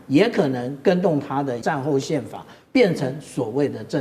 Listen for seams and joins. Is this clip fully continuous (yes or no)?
no